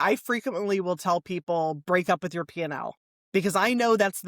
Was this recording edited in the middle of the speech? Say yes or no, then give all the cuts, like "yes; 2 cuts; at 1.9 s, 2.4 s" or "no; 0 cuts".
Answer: no; 0 cuts